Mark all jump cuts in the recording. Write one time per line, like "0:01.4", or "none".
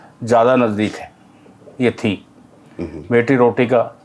none